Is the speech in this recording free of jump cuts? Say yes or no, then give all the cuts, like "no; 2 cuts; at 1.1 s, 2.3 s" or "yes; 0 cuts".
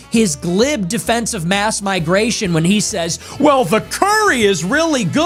yes; 0 cuts